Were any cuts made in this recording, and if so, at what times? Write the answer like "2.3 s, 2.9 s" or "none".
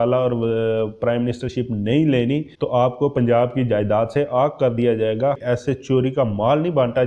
5.4 s